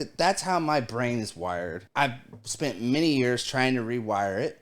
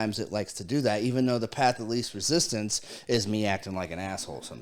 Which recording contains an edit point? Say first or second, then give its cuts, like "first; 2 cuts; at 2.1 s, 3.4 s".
first; 1 cut; at 1.8 s